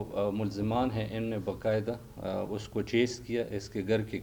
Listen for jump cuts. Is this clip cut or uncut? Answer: uncut